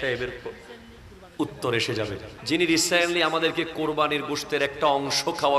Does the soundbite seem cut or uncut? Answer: cut